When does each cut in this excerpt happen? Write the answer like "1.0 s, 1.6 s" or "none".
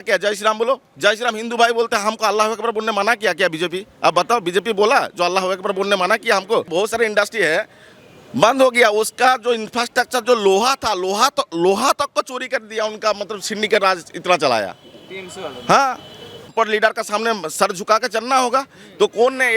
6.7 s, 16.5 s